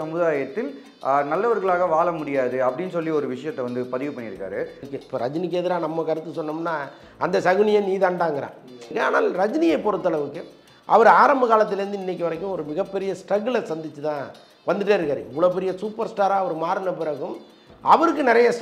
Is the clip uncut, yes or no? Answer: no